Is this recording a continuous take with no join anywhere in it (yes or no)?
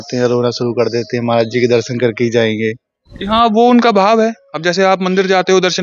yes